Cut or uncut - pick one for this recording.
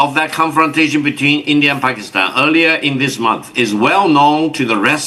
uncut